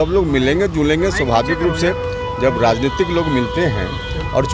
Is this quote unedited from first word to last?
yes; 0 cuts

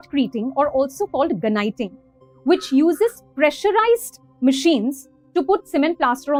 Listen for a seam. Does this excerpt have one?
no; 0 cuts

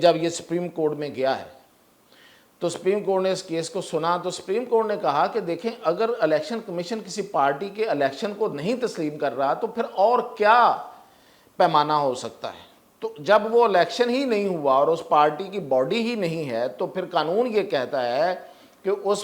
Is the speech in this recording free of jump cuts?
yes; 0 cuts

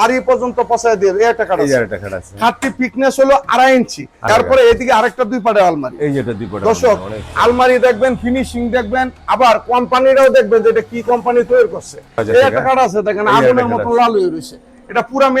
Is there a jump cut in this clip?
yes; 2 cuts; at 4.2 s, 12.2 s

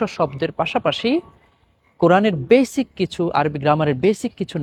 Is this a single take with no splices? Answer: yes; 0 cuts

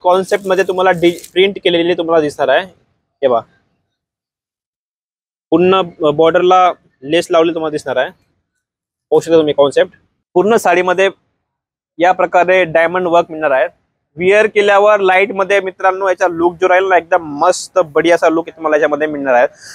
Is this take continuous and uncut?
no; 1 cut; at 10.2 s

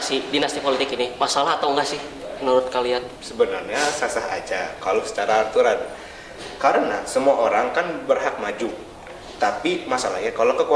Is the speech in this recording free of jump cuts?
yes; 0 cuts

